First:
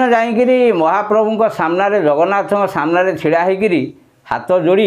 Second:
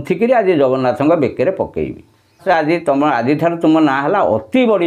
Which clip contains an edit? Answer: second; 1 cut; at 2.4 s

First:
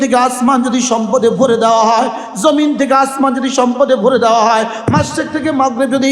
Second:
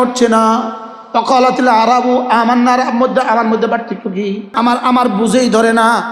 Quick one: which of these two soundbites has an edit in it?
second; 1 cut; at 4.5 s

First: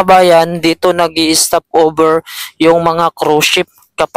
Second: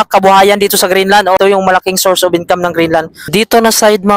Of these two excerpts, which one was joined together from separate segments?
second; 2 cuts; at 1.4 s, 3.2 s

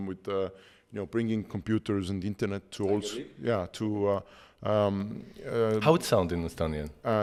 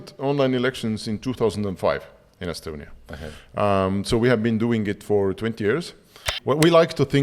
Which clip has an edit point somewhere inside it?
second; 1 cut; at 6.3 s

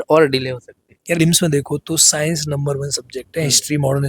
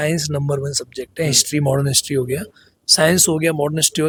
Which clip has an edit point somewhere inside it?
first; 1 cut; at 1.2 s

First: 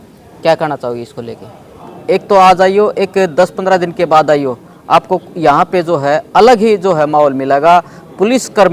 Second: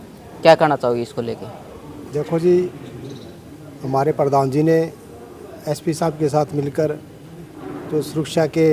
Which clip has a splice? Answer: first; 1 cut; at 1.9 s

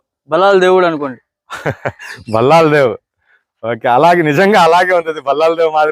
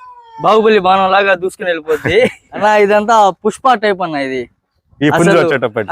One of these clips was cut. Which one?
second; 1 cut; at 2.5 s

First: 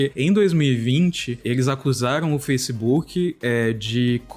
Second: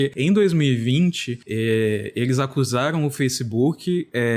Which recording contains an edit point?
first; 1 cut; at 1.4 s

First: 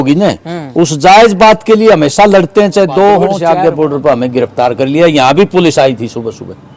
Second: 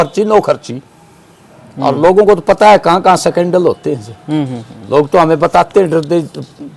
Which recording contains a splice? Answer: first; 1 cut; at 3.4 s

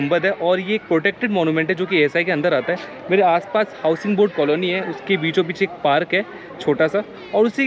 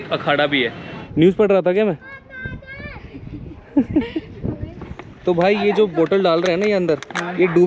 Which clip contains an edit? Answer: second; 2 cuts; at 0.9 s, 5.0 s

